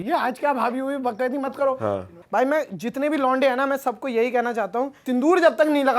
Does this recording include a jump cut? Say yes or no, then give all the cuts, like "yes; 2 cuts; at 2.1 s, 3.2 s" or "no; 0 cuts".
yes; 2 cuts; at 2.1 s, 5.0 s